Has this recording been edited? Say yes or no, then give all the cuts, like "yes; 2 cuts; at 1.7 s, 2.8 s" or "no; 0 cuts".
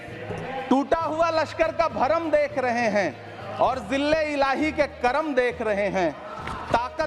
no; 0 cuts